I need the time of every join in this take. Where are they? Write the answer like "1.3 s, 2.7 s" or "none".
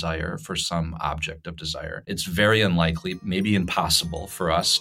2.1 s